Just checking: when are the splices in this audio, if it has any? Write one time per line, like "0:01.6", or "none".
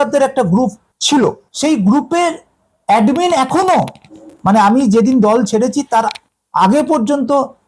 0:01.4